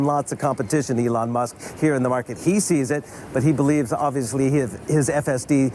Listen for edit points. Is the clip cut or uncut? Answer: uncut